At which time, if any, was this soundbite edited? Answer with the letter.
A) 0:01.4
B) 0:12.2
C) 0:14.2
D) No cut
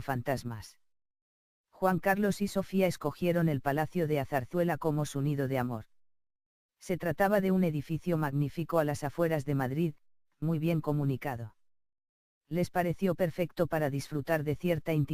B